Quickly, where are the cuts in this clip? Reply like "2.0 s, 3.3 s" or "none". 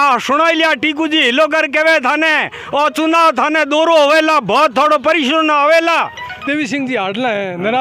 6.4 s